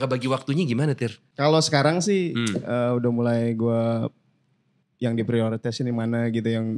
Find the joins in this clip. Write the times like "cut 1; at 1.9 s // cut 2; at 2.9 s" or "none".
cut 1; at 1.2 s